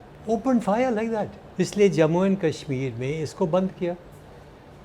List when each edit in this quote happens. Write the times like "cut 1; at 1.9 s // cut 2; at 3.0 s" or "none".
cut 1; at 1.4 s